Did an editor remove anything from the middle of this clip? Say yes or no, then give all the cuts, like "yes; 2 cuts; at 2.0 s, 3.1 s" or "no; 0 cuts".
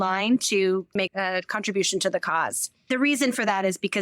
yes; 2 cuts; at 0.9 s, 2.8 s